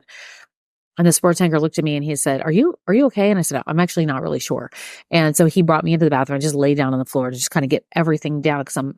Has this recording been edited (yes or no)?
no